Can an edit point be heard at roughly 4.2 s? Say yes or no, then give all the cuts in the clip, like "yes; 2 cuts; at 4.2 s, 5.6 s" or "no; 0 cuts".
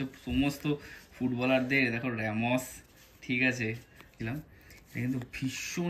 yes; 1 cut; at 4.2 s